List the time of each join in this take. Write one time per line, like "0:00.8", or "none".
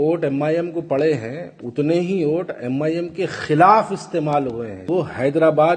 0:04.8